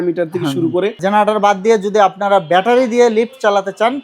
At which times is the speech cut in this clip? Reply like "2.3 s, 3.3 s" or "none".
1.0 s

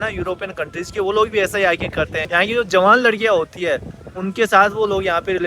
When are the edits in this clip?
none

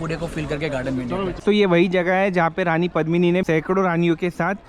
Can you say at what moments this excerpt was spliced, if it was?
1.4 s, 3.4 s

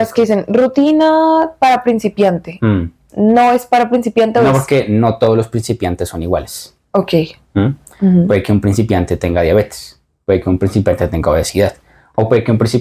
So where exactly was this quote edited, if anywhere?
none

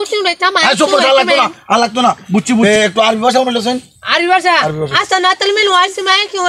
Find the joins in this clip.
2.6 s

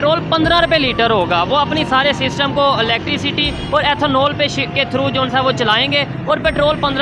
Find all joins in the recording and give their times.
none

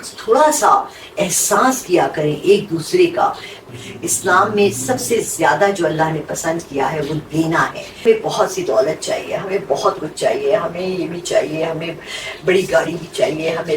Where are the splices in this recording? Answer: 3.6 s, 7.9 s

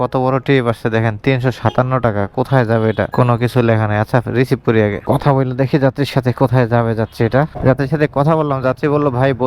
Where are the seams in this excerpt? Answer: none

